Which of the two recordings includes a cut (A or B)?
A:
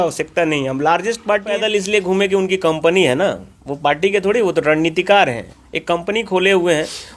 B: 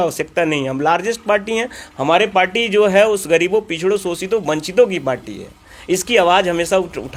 A